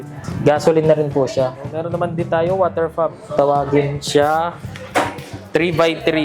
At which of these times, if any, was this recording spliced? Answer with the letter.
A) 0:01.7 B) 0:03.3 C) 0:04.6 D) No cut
A